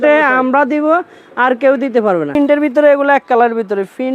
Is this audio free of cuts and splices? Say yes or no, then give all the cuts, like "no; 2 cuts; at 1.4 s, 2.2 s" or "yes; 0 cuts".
no; 1 cut; at 2.4 s